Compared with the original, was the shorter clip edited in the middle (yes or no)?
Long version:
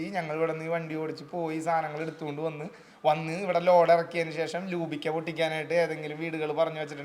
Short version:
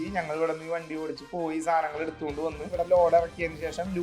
yes